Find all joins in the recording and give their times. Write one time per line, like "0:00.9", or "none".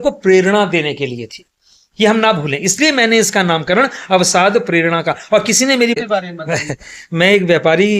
0:06.0